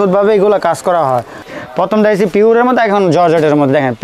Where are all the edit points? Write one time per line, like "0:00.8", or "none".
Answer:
0:01.6